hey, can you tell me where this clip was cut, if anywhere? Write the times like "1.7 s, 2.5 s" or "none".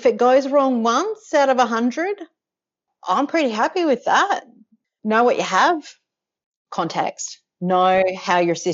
4.4 s, 6.5 s